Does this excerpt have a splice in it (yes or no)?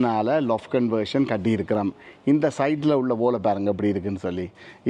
no